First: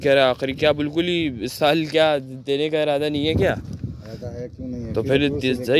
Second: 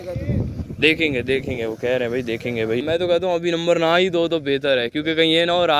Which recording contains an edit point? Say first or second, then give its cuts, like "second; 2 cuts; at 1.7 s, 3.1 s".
second; 1 cut; at 2.8 s